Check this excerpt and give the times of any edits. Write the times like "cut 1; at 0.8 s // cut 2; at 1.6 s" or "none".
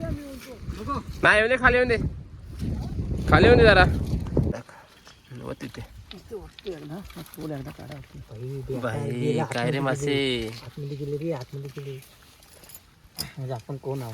cut 1; at 4.6 s